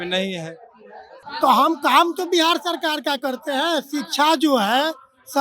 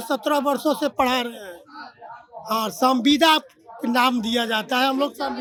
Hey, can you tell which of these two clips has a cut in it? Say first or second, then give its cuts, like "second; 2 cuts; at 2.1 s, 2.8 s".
first; 1 cut; at 1.2 s